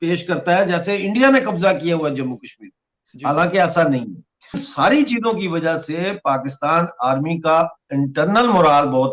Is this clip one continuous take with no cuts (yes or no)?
no